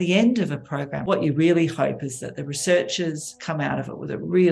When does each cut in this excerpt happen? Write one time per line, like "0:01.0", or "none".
0:01.0